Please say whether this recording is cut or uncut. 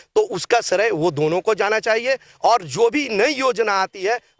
uncut